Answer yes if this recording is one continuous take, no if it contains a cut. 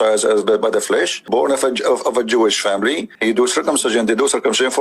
no